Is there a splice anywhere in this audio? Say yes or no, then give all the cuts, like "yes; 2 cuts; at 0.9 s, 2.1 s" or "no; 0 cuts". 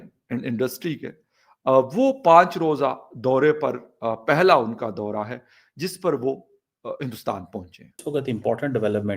yes; 1 cut; at 8.1 s